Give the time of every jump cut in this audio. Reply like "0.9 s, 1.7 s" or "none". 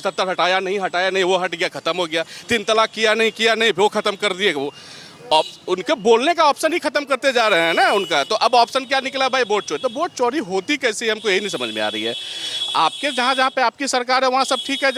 none